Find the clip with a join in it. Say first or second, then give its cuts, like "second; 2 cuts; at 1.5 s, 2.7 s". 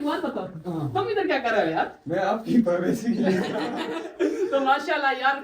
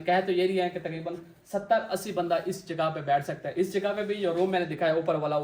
first; 1 cut; at 4.1 s